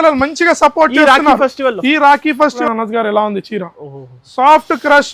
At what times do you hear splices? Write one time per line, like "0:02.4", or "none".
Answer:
0:02.6